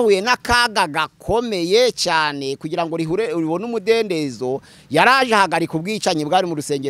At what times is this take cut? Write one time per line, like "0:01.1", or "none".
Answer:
none

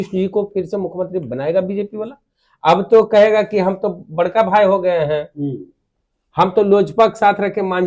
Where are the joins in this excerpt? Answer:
none

